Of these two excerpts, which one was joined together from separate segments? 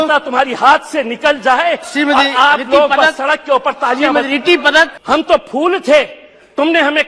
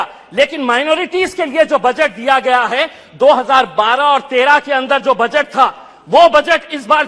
first; 1 cut; at 5.0 s

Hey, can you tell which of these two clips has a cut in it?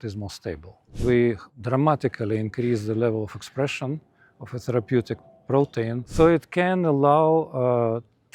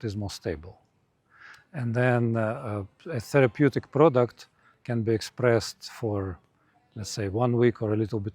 first; 3 cuts; at 1.0 s, 1.5 s, 6.1 s

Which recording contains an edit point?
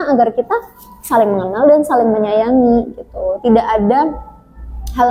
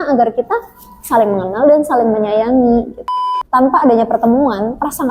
second; 1 cut; at 3.2 s

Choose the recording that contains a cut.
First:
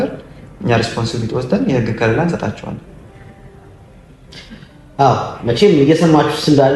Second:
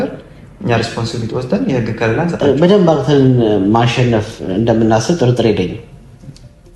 second; 1 cut; at 2.4 s

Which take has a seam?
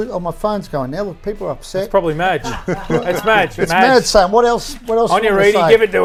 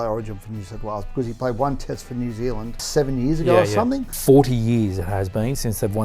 second; 2 cuts; at 2.7 s, 4.1 s

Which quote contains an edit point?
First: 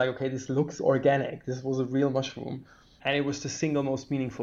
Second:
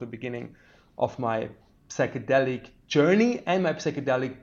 first; 1 cut; at 2.9 s

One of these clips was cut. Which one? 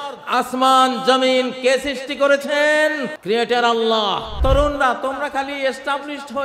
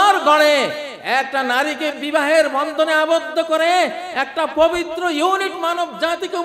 first; 2 cuts; at 3.1 s, 4.4 s

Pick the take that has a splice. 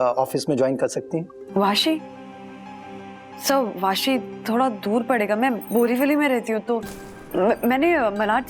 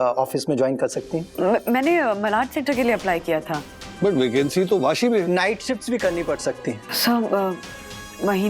second; 3 cuts; at 1.2 s, 5.3 s, 6.9 s

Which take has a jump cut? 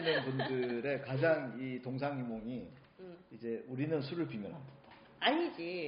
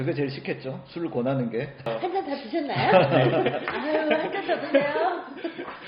second; 1 cut; at 1.9 s

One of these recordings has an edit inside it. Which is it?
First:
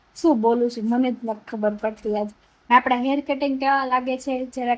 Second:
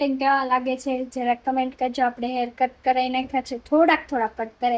first; 1 cut; at 2.5 s

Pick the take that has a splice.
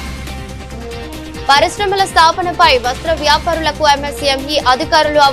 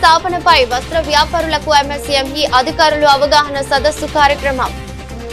first; 1 cut; at 1.1 s

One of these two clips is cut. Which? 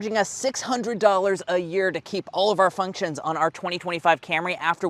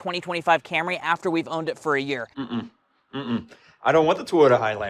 second; 1 cut; at 2.3 s

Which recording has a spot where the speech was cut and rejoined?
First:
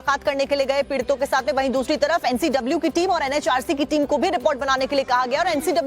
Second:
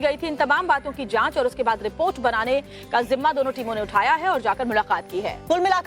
first; 1 cut; at 3.6 s

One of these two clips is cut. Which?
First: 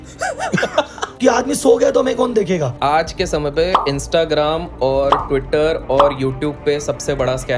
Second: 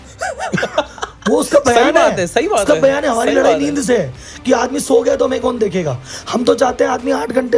first; 2 cuts; at 1.0 s, 2.7 s

